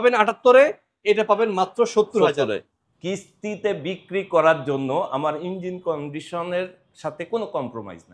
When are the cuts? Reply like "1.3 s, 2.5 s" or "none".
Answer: 2.8 s